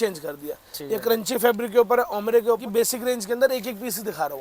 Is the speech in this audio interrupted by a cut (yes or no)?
yes